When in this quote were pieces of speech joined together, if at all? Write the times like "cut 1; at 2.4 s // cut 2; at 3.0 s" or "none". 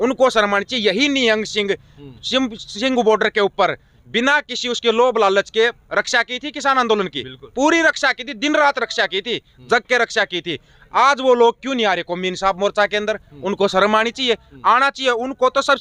none